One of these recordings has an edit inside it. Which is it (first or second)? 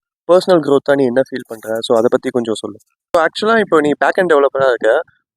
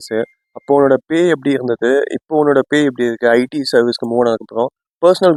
first